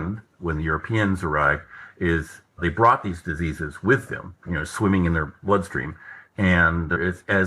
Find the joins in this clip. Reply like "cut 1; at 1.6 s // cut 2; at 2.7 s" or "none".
none